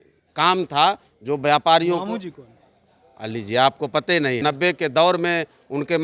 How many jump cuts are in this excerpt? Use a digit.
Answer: 1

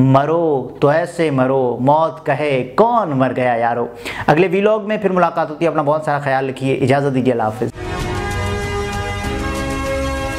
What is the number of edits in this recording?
0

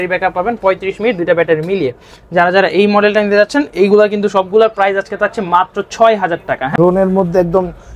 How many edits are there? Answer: 1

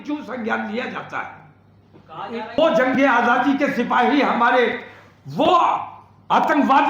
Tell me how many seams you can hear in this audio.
1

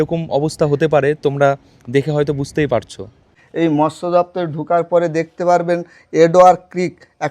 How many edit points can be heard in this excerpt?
1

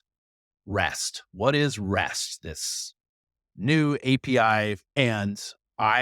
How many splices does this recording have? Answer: 1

